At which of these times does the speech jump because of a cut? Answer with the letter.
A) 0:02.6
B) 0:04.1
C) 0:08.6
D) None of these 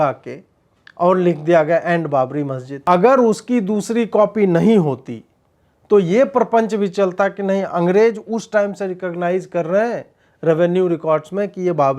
A